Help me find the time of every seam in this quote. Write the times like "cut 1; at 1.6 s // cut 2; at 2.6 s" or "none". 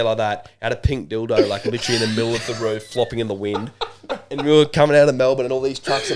none